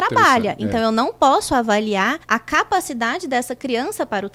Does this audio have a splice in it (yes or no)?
no